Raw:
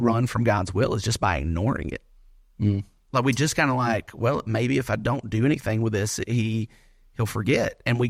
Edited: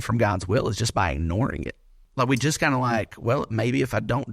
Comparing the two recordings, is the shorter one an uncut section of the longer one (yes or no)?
no